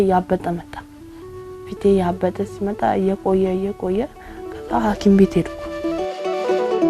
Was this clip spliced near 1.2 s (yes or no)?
no